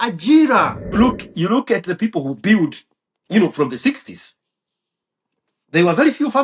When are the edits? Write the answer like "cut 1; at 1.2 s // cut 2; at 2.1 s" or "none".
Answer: cut 1; at 0.9 s